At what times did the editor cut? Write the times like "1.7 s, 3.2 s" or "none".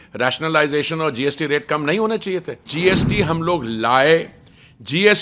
2.7 s